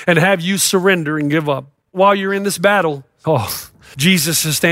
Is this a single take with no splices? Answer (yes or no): no